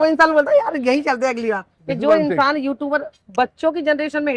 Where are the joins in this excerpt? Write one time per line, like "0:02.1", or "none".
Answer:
0:01.8
0:03.2